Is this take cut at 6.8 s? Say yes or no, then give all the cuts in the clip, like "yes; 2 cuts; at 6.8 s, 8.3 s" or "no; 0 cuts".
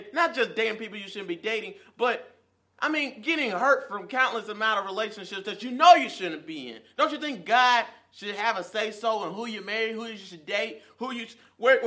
no; 0 cuts